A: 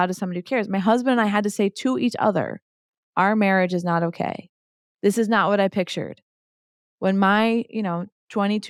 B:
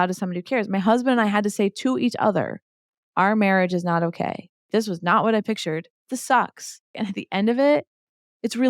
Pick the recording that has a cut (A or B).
B